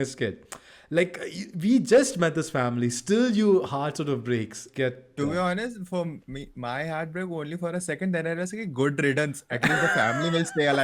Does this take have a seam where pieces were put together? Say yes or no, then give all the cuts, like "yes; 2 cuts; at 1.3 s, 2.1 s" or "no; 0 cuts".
yes; 1 cut; at 4.6 s